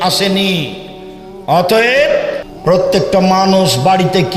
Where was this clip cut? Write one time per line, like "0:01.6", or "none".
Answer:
0:02.4